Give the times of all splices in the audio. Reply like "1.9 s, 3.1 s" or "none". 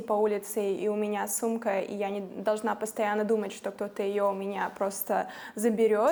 none